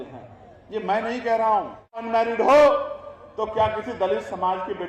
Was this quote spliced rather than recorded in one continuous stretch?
yes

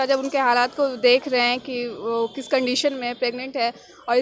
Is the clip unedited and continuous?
yes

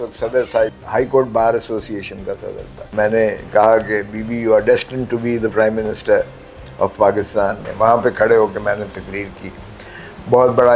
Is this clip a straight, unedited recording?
no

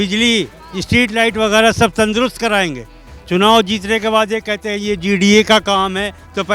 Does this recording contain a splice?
no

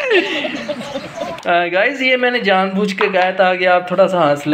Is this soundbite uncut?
no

